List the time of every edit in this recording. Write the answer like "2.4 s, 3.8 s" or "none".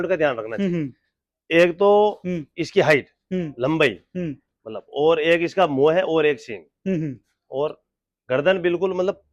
none